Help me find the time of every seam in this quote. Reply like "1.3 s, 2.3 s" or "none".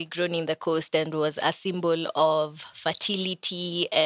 none